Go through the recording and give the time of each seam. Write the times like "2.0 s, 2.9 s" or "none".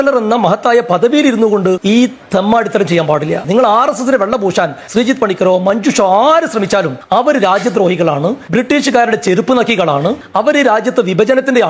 1.8 s, 4.8 s, 7.0 s, 8.4 s